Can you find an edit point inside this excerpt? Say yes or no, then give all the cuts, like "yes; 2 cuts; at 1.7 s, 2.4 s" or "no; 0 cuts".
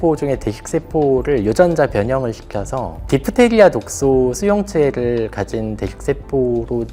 no; 0 cuts